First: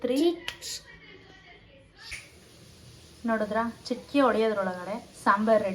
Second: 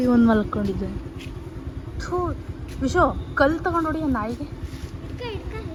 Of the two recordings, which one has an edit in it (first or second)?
first